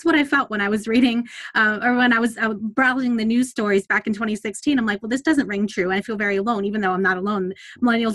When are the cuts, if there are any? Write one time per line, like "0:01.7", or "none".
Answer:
none